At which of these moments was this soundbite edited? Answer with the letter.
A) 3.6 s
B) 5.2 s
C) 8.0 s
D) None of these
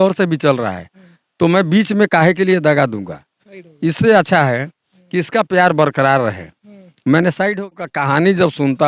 C